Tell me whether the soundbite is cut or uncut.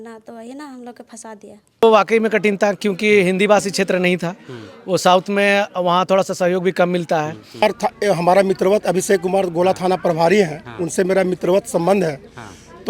cut